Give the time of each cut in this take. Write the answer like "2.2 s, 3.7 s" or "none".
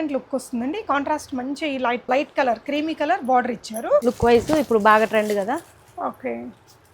4.0 s